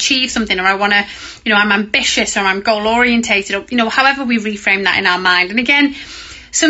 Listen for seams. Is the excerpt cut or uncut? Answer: uncut